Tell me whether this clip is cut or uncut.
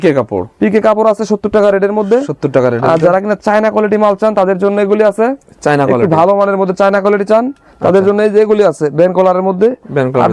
uncut